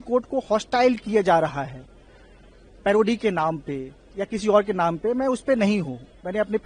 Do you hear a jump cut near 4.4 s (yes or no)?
no